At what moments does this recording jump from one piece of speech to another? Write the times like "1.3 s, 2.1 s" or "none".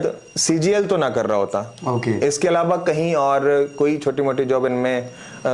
none